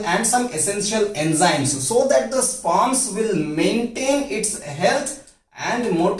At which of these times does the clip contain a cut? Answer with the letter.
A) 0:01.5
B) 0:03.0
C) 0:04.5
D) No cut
D